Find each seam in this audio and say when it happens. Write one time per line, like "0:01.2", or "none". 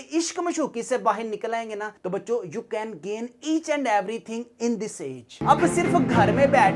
0:01.9
0:05.4